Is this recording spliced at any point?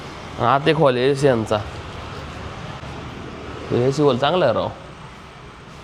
no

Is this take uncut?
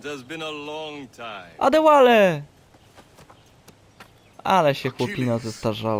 yes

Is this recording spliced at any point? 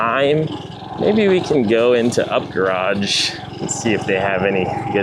no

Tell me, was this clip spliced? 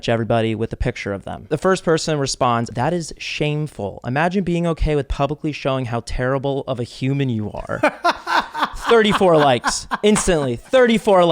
yes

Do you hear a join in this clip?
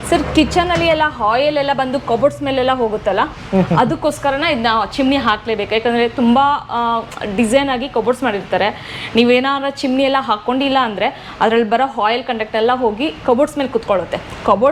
no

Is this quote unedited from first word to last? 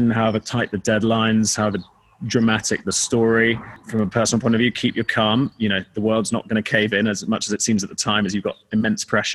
no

